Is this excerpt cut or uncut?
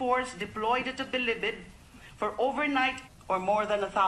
uncut